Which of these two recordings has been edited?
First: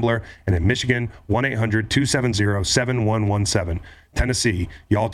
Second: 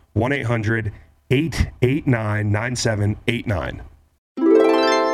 second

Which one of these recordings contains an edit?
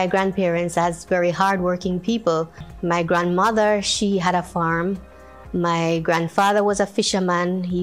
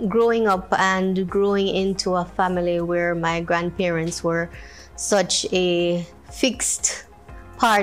first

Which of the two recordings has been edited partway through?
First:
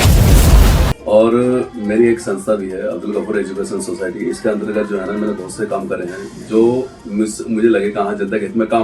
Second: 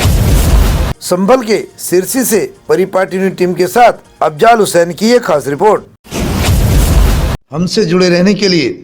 first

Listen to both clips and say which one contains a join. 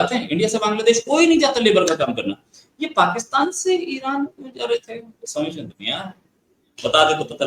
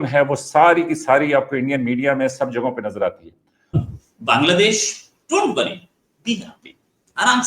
second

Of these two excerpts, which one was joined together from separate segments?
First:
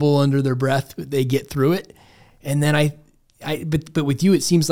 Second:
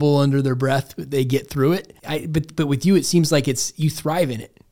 second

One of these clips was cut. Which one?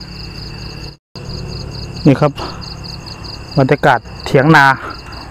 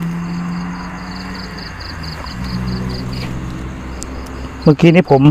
first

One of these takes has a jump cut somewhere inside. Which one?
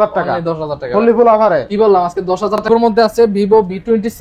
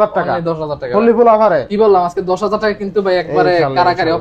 first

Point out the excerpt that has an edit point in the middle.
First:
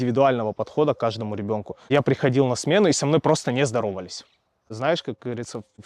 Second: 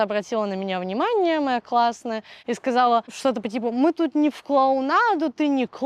first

